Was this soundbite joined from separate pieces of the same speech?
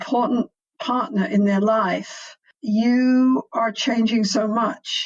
yes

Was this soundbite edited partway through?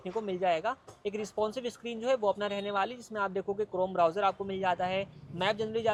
no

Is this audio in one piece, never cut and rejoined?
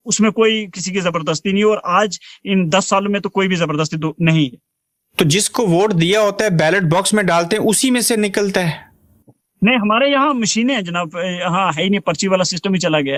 yes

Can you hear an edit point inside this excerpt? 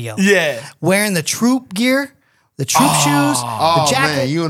no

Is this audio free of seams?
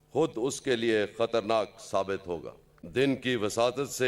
no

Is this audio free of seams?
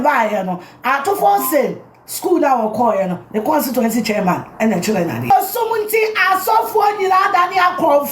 no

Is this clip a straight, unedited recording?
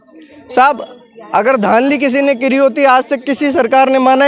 yes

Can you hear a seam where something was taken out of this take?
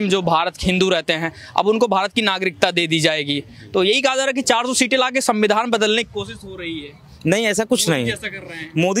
no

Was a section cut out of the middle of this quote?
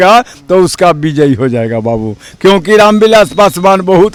no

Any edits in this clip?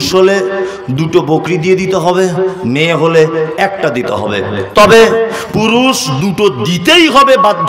no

